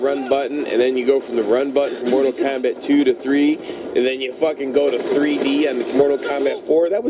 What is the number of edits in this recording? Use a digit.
1